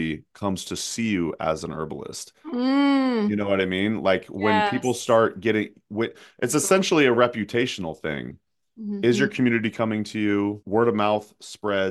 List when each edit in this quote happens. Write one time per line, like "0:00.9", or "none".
0:10.6